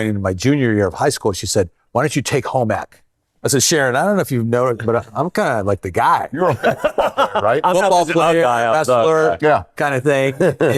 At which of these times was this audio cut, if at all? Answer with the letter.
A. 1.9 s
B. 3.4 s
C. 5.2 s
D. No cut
B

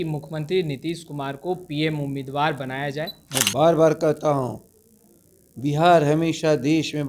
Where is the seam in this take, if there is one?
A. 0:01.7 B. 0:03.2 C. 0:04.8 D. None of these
B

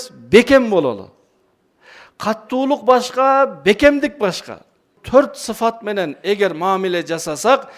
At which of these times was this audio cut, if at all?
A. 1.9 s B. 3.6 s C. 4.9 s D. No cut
C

